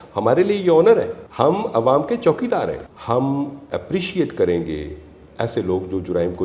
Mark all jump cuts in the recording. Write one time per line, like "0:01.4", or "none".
0:01.2
0:02.9